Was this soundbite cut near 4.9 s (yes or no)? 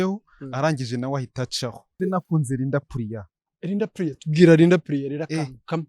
no